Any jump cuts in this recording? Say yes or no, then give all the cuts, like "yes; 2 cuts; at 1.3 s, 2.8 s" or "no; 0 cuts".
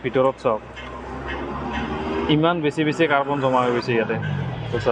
no; 0 cuts